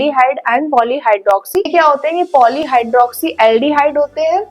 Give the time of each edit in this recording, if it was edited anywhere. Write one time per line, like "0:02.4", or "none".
0:01.7